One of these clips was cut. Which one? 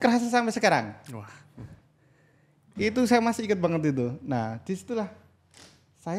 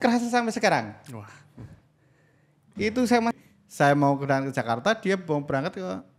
second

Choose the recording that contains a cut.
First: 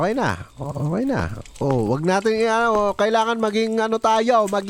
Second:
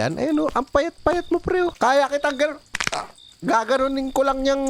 second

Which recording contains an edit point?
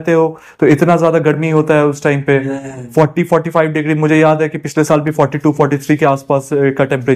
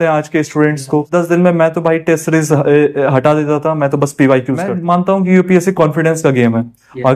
second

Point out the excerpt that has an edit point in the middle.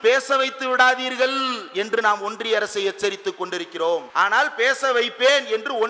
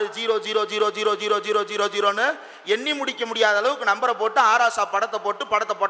first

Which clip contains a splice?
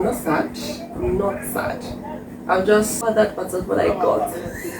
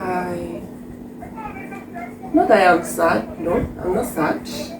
first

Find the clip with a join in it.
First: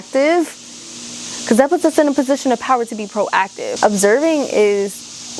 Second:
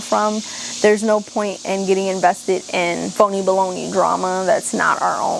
first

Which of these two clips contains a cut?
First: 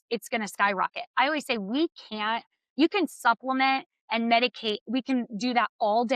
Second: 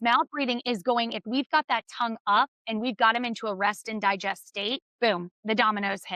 second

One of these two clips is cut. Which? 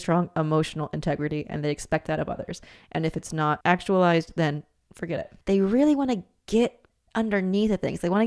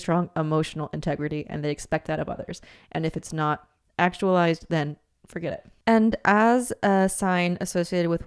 first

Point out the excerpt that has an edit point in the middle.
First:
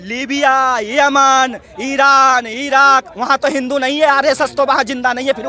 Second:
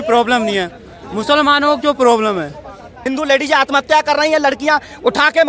second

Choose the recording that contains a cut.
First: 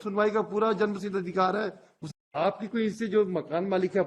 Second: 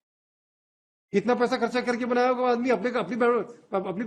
first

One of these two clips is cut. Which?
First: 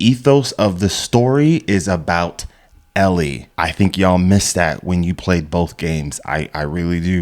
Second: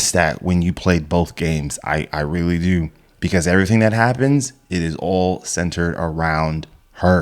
first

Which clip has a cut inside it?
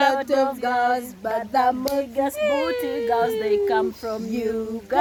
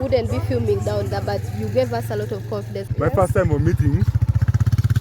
second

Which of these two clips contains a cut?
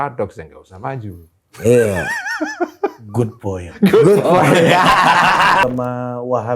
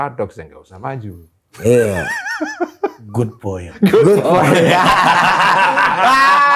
first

